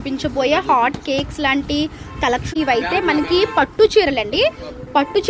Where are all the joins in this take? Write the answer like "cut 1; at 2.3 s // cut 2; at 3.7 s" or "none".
cut 1; at 2.5 s